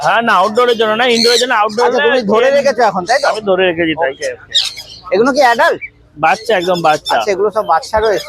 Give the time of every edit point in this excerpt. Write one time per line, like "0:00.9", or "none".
none